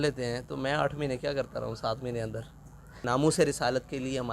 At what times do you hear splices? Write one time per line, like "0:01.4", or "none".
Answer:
0:02.9